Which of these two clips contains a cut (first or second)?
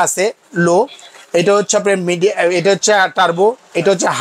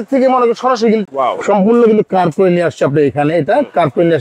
second